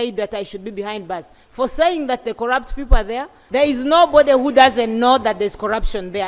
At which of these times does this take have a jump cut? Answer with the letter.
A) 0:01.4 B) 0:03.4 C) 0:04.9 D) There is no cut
B